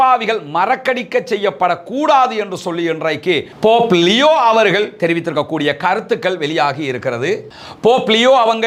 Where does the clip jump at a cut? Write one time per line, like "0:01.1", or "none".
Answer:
none